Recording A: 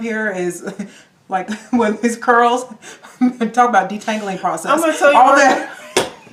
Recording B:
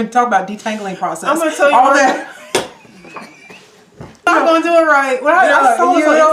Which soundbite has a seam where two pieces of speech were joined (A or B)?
B